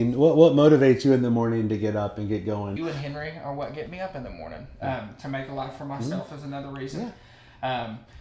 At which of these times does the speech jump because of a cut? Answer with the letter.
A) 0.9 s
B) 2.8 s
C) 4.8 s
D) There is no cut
B